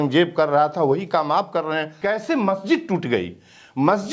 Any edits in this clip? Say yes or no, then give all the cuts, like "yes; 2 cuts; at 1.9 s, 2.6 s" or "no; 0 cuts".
yes; 1 cut; at 2.0 s